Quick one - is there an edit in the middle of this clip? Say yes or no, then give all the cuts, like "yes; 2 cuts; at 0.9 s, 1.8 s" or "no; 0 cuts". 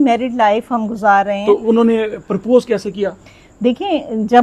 no; 0 cuts